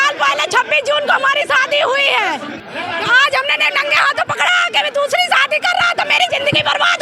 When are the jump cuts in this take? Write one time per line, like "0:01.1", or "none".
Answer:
0:02.6

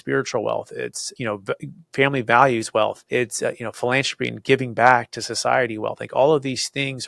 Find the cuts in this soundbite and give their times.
0:01.1
0:03.0

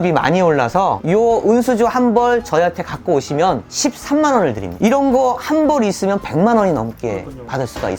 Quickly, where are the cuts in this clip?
0:01.0
0:04.7

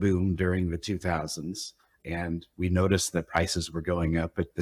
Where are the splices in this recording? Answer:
0:02.0

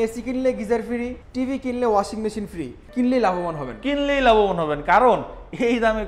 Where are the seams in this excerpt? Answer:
0:01.2
0:02.9

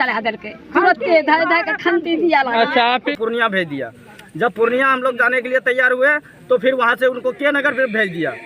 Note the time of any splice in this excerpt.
0:03.0

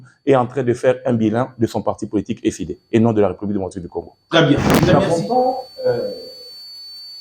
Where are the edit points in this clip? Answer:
0:04.7

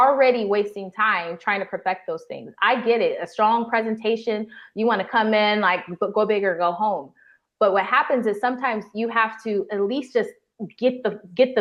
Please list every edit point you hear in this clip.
none

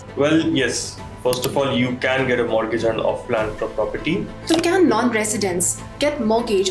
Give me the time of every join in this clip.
0:04.5

